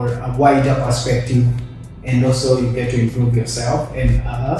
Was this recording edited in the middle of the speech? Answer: no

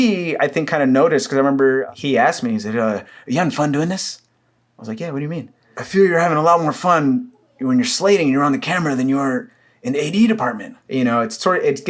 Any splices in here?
yes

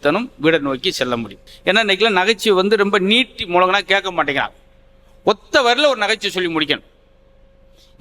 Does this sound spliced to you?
yes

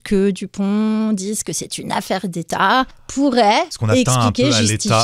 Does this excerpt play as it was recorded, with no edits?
no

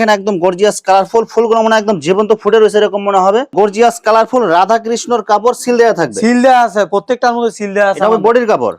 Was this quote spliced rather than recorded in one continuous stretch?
yes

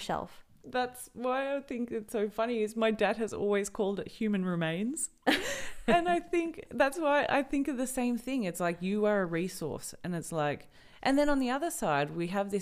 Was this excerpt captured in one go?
yes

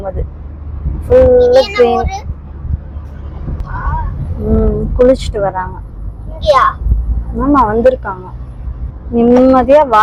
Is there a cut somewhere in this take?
no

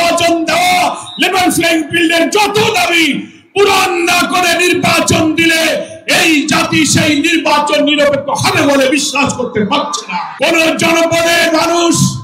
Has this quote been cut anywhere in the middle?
yes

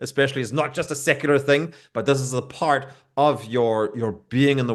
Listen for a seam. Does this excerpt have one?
no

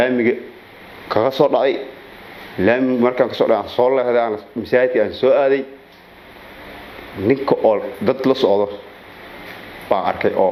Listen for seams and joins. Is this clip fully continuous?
yes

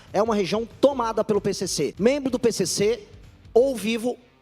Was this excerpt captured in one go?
no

